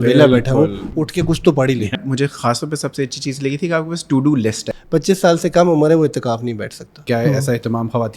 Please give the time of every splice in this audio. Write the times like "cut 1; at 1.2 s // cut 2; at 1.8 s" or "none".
cut 1; at 2.0 s // cut 2; at 4.7 s // cut 3; at 7.1 s